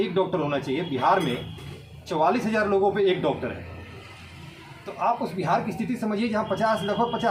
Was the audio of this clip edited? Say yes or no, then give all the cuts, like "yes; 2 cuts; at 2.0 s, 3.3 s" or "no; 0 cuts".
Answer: no; 0 cuts